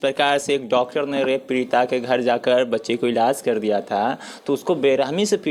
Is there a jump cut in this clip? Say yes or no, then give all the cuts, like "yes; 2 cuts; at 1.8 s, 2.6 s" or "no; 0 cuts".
no; 0 cuts